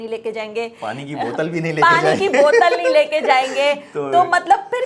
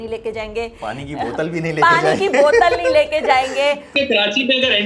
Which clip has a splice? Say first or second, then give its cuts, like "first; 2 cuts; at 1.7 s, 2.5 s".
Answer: second; 1 cut; at 3.9 s